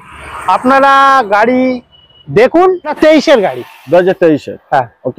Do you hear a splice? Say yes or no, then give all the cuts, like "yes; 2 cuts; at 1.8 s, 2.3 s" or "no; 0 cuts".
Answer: yes; 1 cut; at 3.0 s